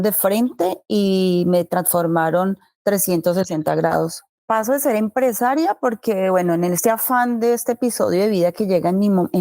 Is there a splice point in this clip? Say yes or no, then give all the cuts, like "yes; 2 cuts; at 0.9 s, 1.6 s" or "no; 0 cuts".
yes; 1 cut; at 4.2 s